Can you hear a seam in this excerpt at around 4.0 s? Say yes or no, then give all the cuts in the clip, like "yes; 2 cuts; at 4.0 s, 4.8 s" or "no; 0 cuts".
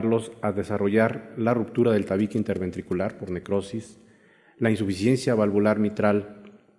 no; 1 cut; at 1.7 s